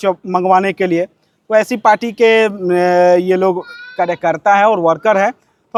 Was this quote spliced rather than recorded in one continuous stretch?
no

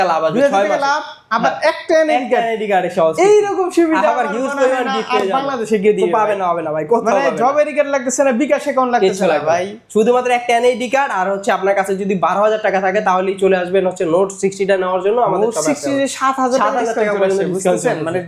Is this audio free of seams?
yes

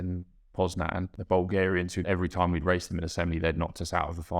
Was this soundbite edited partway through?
yes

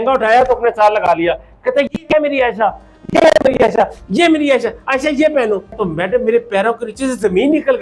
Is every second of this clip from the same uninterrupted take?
no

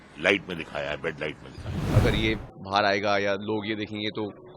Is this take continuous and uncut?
no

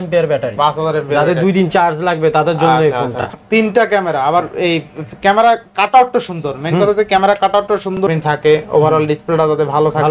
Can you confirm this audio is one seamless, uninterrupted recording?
no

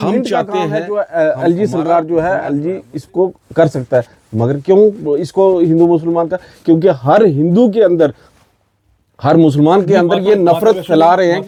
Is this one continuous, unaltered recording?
yes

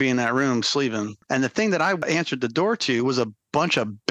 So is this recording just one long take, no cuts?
no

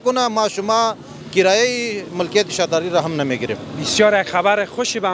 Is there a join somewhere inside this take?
no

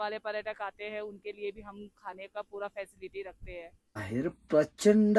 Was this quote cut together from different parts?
yes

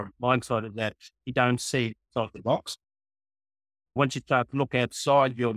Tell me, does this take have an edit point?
yes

